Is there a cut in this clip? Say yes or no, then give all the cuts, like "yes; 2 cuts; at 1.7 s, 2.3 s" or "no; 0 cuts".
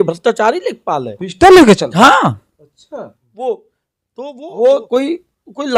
yes; 1 cut; at 3.2 s